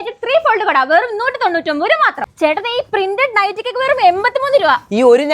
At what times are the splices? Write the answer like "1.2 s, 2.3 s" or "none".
2.3 s